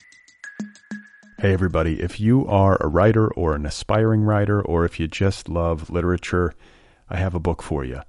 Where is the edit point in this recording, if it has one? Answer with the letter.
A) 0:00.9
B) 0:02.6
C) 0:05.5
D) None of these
A